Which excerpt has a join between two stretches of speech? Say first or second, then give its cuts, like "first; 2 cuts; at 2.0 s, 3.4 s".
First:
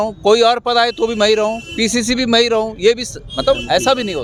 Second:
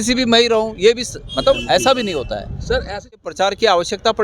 second; 1 cut; at 3.2 s